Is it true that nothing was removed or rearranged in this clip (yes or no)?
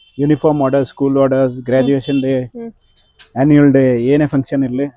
yes